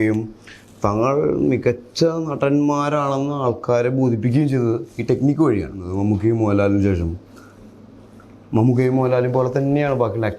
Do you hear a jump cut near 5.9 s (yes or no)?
yes